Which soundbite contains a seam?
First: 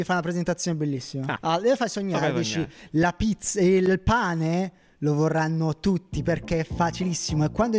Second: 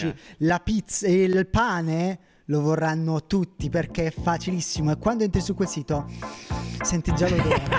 first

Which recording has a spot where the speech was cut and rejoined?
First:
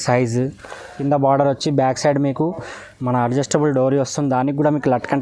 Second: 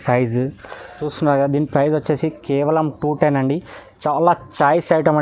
first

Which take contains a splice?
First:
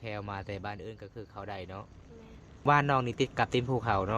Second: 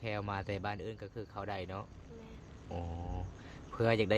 first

